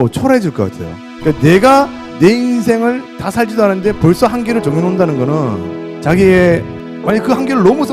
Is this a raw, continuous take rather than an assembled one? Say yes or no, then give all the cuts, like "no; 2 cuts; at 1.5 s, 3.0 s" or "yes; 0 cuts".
yes; 0 cuts